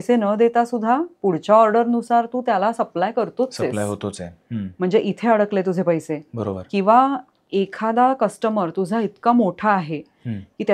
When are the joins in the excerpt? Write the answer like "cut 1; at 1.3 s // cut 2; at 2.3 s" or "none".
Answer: none